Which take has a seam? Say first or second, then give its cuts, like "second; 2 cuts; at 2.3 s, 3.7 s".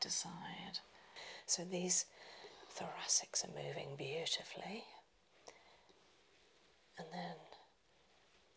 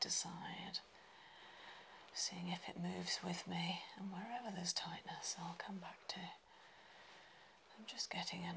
first; 1 cut; at 1.3 s